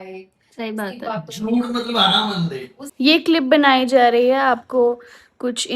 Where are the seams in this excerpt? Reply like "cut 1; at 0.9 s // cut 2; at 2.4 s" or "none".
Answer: cut 1; at 2.8 s